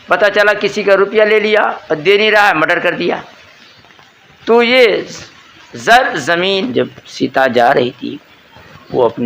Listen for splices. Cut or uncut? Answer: cut